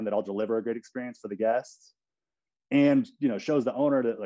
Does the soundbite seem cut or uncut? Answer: uncut